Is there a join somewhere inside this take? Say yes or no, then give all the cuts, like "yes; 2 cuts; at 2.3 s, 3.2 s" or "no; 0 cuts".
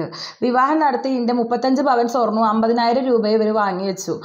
no; 0 cuts